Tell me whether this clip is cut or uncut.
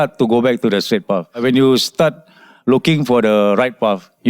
cut